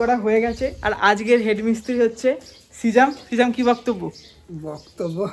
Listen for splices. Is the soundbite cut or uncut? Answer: uncut